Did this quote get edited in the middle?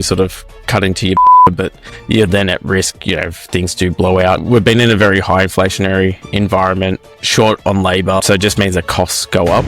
yes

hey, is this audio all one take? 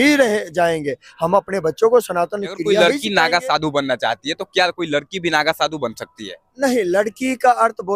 no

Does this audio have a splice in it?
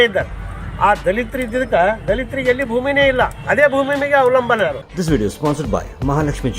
yes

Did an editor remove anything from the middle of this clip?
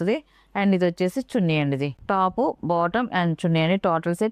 no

